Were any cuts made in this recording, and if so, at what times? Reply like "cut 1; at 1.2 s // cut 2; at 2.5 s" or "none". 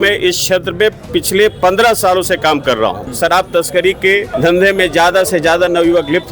cut 1; at 3.0 s // cut 2; at 4.3 s